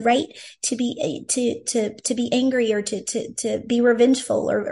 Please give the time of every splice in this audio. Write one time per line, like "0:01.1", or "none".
none